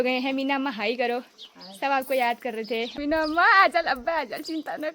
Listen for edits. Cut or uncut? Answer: cut